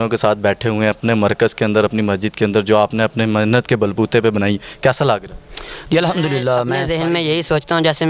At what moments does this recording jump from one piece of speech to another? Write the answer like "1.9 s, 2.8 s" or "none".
6.8 s